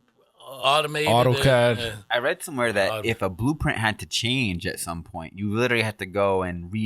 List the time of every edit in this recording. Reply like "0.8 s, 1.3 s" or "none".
none